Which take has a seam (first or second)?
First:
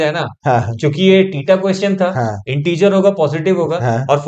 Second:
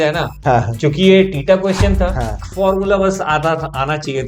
second